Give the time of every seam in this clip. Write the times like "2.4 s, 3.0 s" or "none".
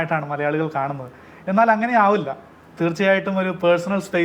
none